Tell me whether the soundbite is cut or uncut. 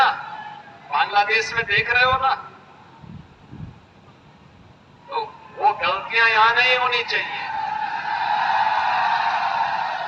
uncut